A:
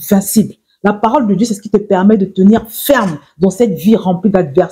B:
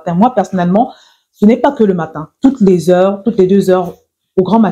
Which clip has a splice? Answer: B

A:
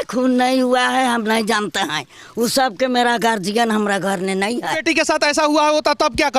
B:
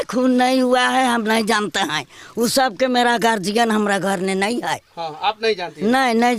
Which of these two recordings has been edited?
A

